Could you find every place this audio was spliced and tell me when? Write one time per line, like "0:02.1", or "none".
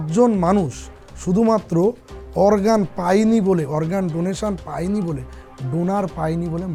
none